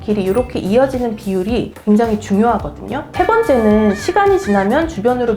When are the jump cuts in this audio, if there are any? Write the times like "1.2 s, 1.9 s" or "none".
3.0 s